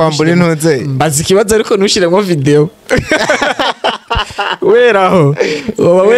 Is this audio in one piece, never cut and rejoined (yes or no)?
yes